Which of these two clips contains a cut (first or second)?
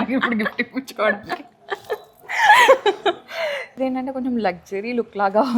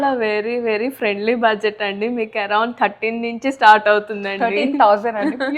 first